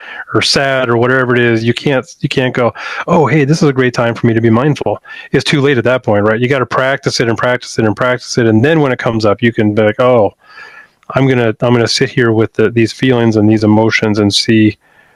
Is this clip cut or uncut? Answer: uncut